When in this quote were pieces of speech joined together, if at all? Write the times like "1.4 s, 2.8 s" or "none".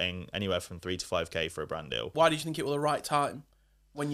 2.1 s